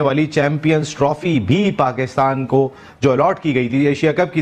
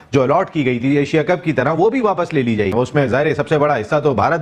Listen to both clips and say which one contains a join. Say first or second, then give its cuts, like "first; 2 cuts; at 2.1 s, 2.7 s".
second; 1 cut; at 2.7 s